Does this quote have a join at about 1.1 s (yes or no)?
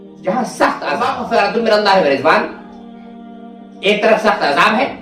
yes